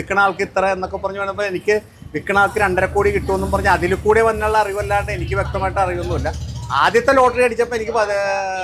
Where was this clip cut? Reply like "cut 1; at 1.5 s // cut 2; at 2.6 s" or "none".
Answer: none

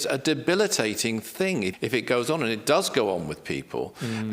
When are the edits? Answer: cut 1; at 1.7 s

